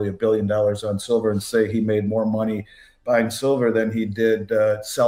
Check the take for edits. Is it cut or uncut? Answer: uncut